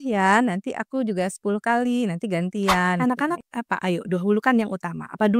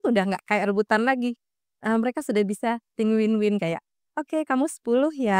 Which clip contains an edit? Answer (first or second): first